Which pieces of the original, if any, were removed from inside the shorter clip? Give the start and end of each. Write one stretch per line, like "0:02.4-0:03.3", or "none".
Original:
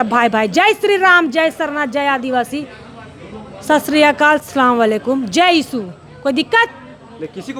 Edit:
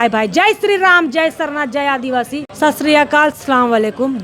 0:02.7-0:03.6